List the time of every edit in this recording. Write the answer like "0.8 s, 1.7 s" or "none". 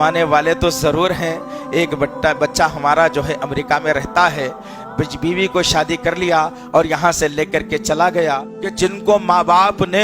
8.5 s